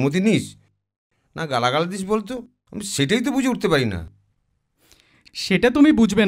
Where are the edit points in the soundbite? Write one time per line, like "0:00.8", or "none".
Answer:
none